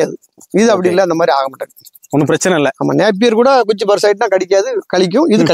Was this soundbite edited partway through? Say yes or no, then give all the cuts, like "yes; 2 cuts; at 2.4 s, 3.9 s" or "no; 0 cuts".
no; 0 cuts